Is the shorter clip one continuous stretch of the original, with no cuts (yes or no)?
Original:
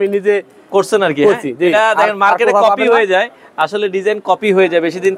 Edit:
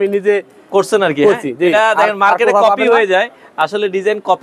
yes